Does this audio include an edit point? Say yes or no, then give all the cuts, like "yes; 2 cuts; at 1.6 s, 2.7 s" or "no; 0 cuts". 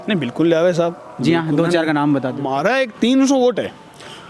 yes; 1 cut; at 2.5 s